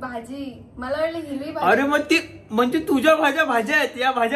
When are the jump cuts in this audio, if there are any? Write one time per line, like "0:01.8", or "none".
none